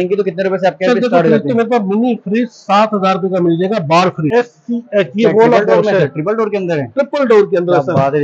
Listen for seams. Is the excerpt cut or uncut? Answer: cut